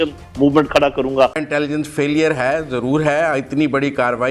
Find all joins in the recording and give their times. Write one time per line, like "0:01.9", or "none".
0:01.4